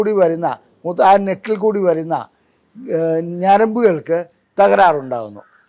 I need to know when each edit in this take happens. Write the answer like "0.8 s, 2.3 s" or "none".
none